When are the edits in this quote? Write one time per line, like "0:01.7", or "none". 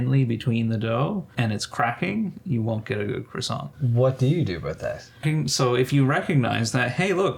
0:01.3
0:03.8
0:05.2